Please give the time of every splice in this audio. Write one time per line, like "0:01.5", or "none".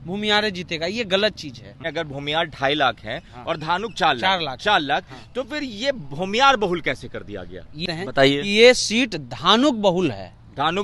0:01.8
0:07.8